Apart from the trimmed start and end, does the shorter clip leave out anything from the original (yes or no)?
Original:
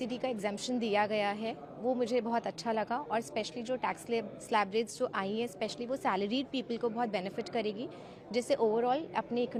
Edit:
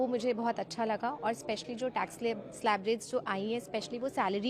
no